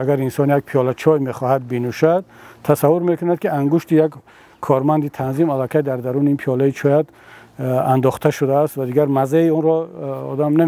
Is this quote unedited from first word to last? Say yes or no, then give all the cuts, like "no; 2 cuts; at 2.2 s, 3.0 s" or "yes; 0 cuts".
yes; 0 cuts